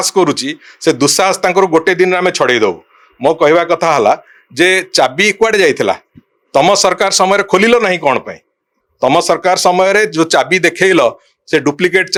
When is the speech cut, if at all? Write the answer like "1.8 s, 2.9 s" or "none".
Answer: none